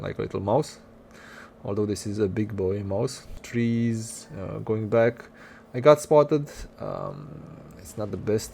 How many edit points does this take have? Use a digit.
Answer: 1